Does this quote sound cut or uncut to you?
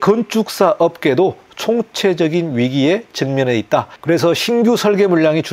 uncut